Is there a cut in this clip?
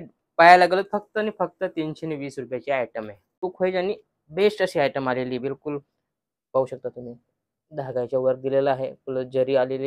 yes; 1 cut; at 3.4 s

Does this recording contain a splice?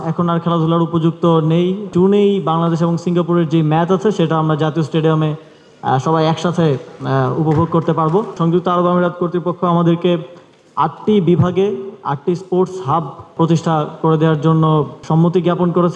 yes; 4 cuts; at 1.9 s, 8.3 s, 13.3 s, 15.0 s

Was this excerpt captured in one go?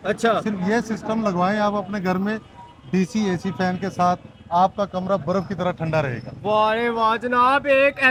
yes; 0 cuts

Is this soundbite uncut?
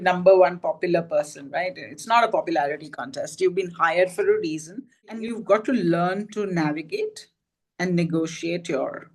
no; 1 cut; at 5.3 s

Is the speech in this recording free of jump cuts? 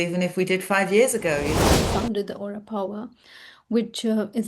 no; 1 cut; at 1.6 s

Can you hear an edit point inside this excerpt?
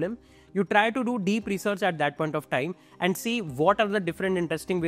no; 0 cuts

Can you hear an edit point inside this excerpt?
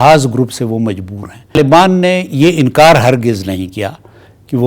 yes; 1 cut; at 1.6 s

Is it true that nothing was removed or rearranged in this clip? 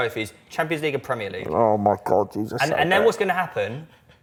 yes; 0 cuts

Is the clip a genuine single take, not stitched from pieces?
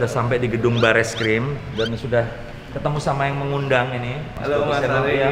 yes; 0 cuts

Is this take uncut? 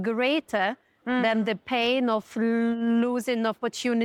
yes; 0 cuts

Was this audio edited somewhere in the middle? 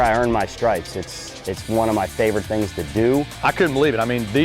yes; 1 cut; at 3.3 s

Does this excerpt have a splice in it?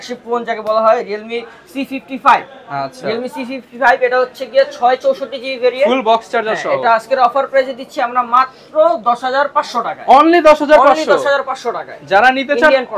no; 0 cuts

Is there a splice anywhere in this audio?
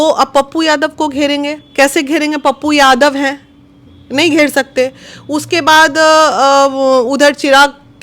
no; 0 cuts

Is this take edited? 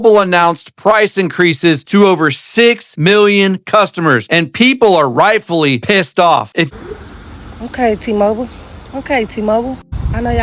yes; 1 cut; at 6.7 s

